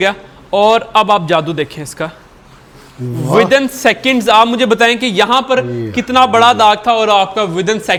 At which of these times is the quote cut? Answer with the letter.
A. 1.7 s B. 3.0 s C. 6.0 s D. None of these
D